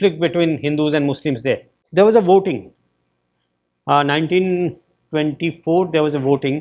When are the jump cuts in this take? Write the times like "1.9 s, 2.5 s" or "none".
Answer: 1.7 s

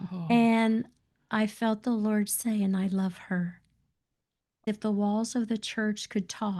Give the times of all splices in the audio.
4.6 s

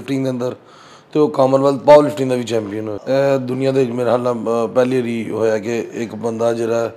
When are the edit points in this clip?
2.9 s

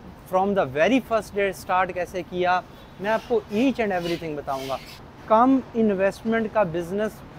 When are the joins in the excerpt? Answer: 5.0 s

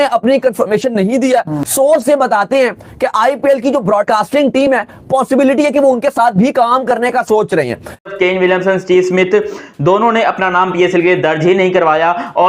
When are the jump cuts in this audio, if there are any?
1.6 s, 8.1 s

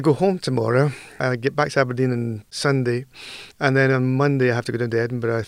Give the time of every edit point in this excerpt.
1.2 s, 2.4 s

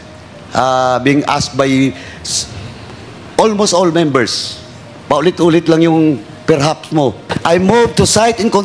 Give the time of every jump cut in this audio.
7.3 s

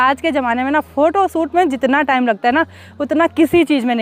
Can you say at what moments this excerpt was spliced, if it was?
none

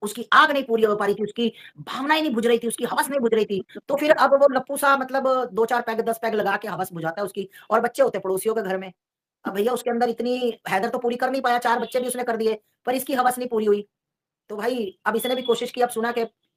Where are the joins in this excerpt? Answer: none

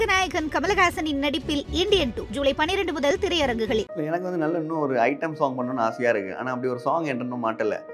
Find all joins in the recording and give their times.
3.9 s

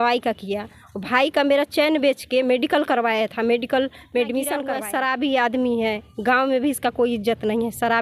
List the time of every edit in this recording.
4.8 s

